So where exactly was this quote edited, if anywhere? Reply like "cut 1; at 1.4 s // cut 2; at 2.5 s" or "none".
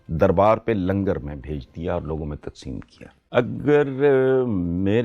cut 1; at 3.1 s